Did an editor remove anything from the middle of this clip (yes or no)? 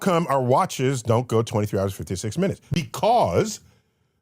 yes